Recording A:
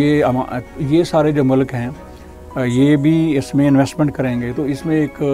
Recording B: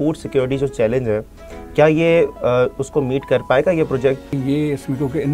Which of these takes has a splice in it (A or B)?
B